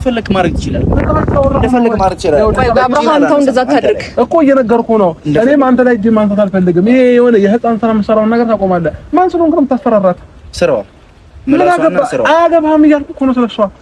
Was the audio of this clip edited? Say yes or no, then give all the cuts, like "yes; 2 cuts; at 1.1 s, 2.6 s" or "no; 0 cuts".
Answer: no; 0 cuts